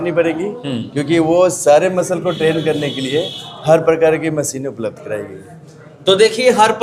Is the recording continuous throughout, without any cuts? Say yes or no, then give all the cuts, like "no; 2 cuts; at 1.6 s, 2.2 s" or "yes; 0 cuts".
yes; 0 cuts